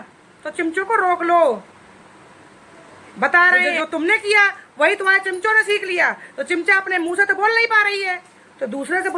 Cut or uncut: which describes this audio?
cut